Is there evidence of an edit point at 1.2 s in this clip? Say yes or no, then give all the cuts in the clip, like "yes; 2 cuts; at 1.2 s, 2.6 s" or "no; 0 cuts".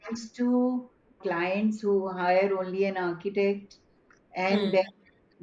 yes; 1 cut; at 1.2 s